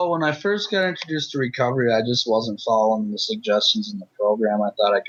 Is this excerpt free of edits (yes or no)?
yes